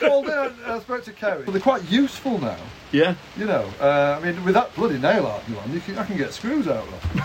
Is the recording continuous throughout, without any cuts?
no; 1 cut; at 1.4 s

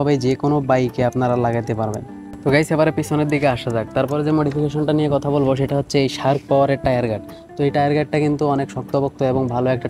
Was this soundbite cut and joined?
no; 0 cuts

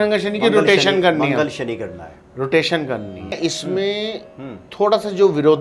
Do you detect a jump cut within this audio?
yes; 1 cut; at 3.3 s

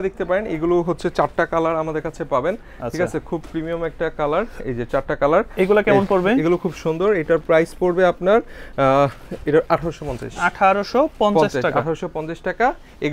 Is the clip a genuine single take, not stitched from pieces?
yes; 0 cuts

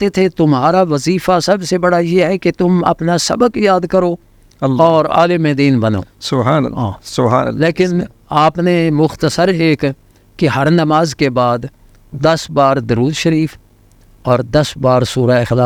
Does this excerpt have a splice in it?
no; 0 cuts

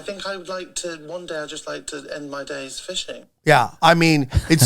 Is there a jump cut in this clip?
yes; 1 cut; at 3.3 s

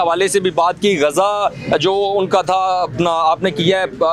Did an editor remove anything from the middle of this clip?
no; 0 cuts

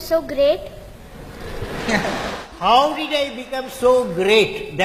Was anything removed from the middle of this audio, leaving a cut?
no; 0 cuts

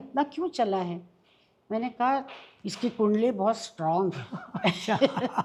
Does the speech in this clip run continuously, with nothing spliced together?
yes; 0 cuts

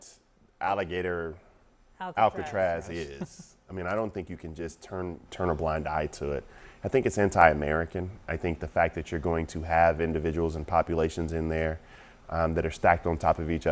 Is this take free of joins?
yes; 0 cuts

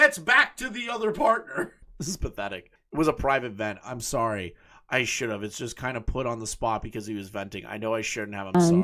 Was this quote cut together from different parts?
no; 0 cuts

